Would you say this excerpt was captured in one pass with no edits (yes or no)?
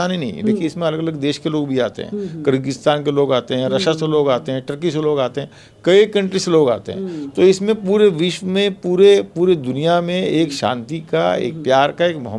yes